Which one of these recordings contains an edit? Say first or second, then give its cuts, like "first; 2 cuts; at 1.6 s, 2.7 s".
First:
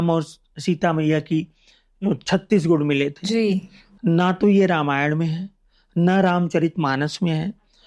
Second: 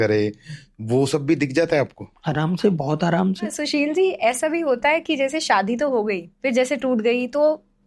second; 2 cuts; at 3.5 s, 6.3 s